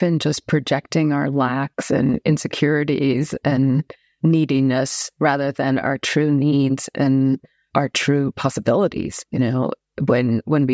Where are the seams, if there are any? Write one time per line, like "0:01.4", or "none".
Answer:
none